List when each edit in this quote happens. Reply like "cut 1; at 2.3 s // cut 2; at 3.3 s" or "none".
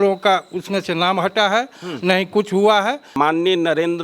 cut 1; at 3.1 s